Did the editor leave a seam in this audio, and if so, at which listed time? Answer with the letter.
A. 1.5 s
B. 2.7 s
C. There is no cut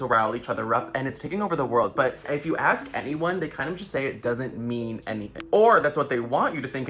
C